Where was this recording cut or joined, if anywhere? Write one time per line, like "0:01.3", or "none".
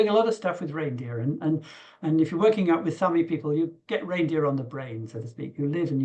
none